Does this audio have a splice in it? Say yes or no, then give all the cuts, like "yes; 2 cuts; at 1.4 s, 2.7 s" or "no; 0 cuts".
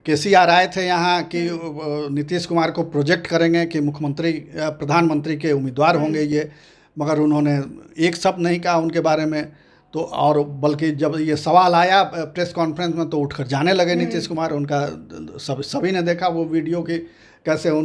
no; 0 cuts